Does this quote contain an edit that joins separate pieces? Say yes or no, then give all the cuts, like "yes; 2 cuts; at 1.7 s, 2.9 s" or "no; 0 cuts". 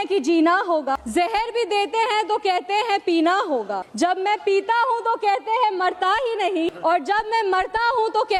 yes; 3 cuts; at 1.0 s, 3.8 s, 6.7 s